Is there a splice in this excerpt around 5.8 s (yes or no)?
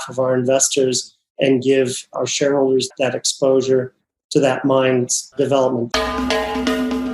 yes